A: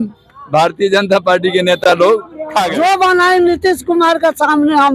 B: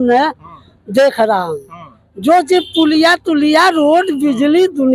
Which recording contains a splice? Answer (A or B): A